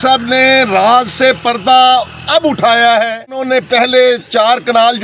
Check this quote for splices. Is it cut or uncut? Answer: cut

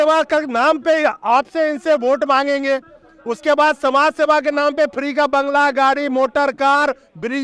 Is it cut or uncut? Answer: uncut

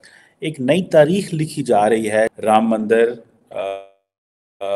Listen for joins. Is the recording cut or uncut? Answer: cut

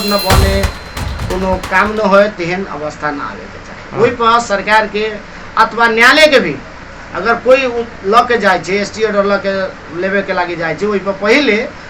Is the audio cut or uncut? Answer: uncut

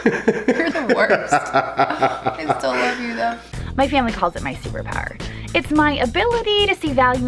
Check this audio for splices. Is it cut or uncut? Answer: cut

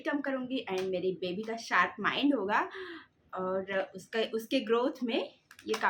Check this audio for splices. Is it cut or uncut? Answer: uncut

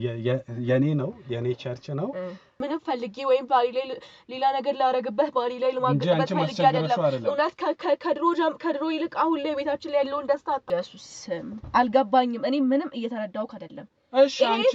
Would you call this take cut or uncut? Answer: cut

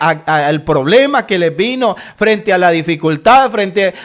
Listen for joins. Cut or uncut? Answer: uncut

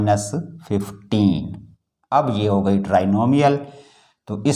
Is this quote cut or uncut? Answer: uncut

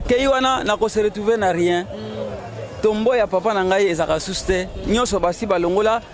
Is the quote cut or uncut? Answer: uncut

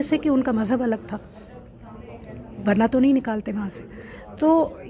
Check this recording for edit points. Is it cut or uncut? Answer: uncut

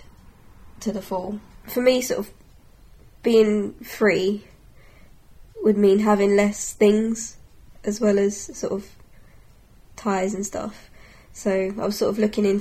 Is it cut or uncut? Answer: cut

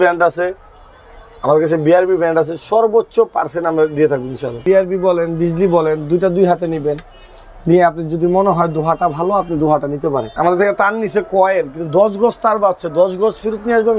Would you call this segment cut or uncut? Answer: cut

